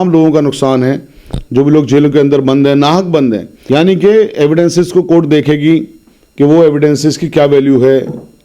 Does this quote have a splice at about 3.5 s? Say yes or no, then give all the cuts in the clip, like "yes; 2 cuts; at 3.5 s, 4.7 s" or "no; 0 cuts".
yes; 1 cut; at 3.5 s